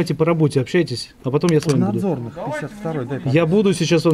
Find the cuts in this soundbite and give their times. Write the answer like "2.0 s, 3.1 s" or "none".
none